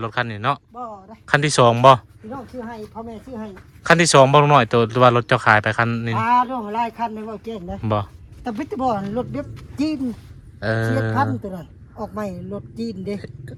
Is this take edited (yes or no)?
no